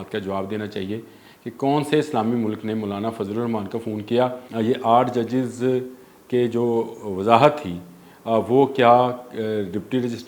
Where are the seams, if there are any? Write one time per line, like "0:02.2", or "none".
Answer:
0:04.4